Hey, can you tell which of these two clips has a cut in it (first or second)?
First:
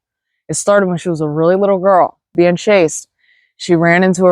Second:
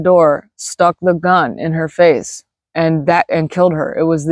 first